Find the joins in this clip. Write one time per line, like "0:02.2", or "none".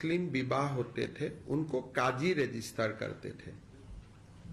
0:01.7